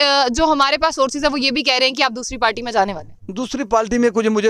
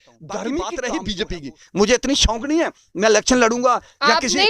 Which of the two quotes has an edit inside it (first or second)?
second